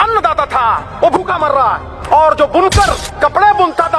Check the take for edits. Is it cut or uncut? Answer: cut